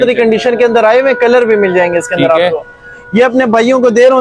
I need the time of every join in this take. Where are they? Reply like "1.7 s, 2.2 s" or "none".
none